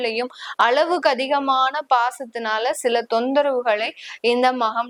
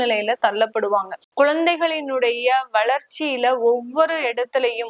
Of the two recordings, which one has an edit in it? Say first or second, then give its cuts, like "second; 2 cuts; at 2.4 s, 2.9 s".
second; 1 cut; at 1.2 s